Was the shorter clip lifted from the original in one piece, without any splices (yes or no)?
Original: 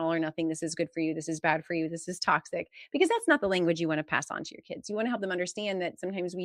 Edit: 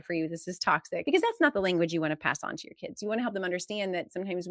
no